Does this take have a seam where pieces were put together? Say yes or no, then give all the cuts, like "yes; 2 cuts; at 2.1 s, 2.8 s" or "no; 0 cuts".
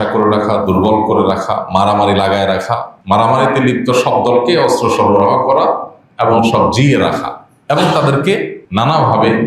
yes; 2 cuts; at 2.9 s, 8.6 s